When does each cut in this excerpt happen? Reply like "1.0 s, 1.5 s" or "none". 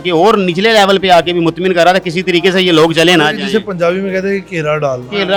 none